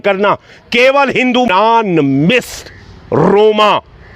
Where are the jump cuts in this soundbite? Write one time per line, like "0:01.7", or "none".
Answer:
0:01.5